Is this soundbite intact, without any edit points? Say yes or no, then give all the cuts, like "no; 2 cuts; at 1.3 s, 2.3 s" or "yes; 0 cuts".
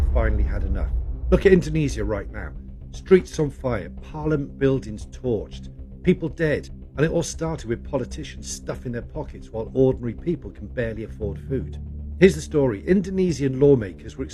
yes; 0 cuts